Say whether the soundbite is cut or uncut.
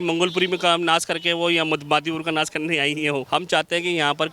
cut